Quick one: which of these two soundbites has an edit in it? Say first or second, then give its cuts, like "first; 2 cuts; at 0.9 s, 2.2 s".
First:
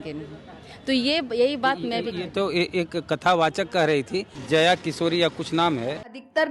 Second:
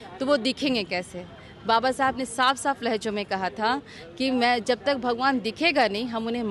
first; 1 cut; at 4.4 s